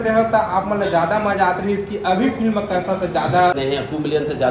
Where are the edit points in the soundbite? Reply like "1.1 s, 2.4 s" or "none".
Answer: 3.6 s